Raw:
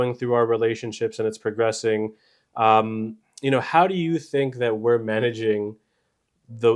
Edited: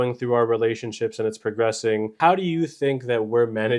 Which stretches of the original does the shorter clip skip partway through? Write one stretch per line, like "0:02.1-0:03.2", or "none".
0:02.1-0:03.7